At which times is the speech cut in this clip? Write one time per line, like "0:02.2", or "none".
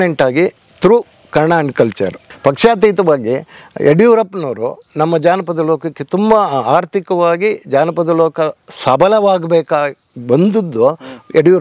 0:02.2